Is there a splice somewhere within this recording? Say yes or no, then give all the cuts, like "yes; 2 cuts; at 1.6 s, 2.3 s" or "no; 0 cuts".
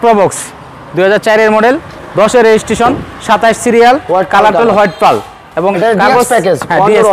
no; 0 cuts